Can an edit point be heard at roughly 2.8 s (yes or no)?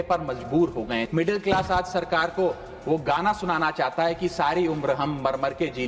no